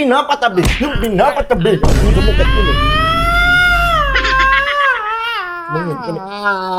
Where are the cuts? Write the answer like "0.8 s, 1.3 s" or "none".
none